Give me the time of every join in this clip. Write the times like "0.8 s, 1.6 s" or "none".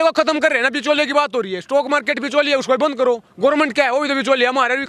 none